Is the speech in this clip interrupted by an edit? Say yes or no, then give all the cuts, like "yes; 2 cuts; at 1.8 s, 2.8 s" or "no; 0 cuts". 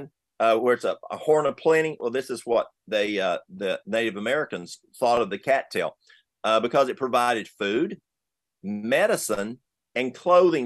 no; 0 cuts